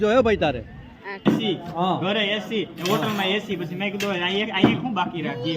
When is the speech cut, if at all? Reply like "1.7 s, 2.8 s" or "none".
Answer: 1.2 s